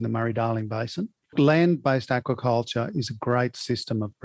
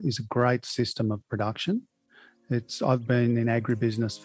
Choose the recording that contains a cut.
first; 1 cut; at 1.3 s

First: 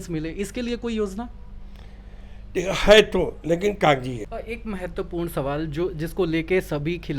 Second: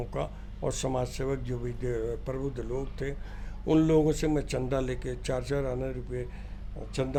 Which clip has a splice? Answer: first; 1 cut; at 4.2 s

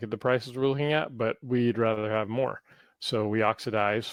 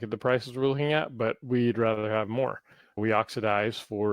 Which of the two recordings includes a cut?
second; 1 cut; at 3.0 s

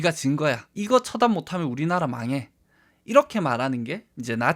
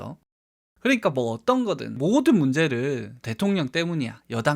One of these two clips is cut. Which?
second; 1 cut; at 3.2 s

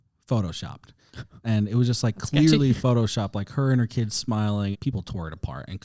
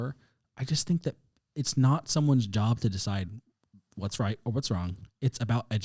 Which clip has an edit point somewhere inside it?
first; 1 cut; at 4.7 s

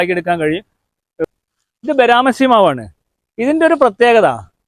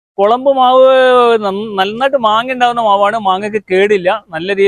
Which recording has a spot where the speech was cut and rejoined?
first; 1 cut; at 1.2 s

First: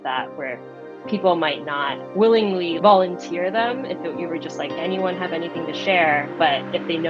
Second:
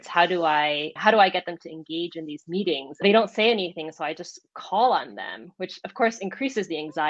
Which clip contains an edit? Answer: second; 1 cut; at 3.0 s

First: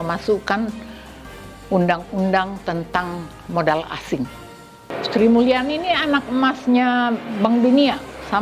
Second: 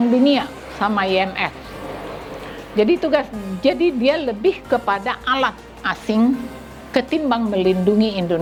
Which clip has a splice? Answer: first; 1 cut; at 4.8 s

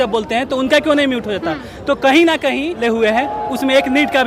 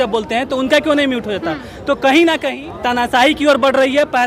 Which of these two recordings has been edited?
second; 1 cut; at 2.7 s

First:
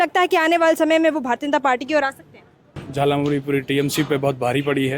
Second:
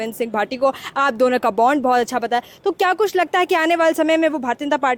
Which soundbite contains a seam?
first; 1 cut; at 2.8 s

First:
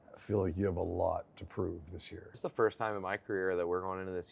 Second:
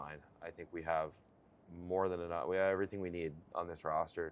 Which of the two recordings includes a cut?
first; 1 cut; at 2.4 s

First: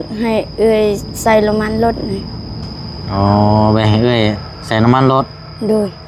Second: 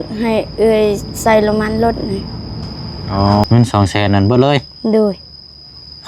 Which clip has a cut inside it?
second; 1 cut; at 3.4 s

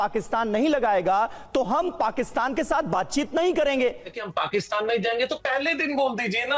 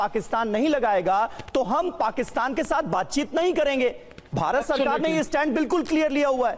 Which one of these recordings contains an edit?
first; 1 cut; at 4.2 s

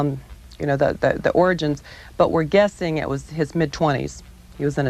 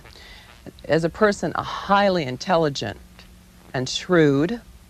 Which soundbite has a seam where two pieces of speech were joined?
first; 1 cut; at 1.8 s

